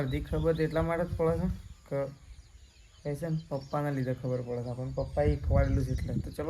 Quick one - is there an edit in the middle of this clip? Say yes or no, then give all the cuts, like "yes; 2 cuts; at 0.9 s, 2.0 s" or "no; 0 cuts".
no; 0 cuts